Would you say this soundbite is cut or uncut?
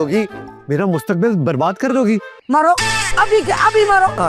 cut